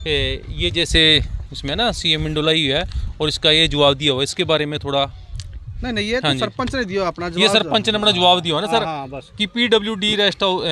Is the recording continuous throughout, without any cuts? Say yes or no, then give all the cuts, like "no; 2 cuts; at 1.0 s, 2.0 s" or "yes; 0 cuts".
yes; 0 cuts